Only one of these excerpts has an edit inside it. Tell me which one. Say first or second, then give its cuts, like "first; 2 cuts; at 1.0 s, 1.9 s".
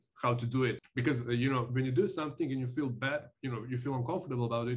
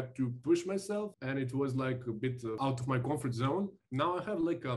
second; 3 cuts; at 1.2 s, 2.6 s, 3.8 s